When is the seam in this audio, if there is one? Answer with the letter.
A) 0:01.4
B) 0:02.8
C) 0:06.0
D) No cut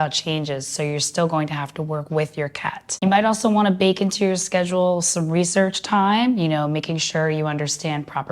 B